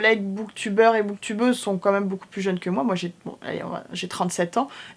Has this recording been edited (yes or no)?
no